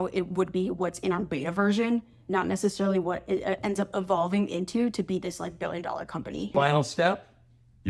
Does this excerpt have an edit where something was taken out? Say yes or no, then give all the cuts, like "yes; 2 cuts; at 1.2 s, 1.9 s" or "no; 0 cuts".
yes; 1 cut; at 6.5 s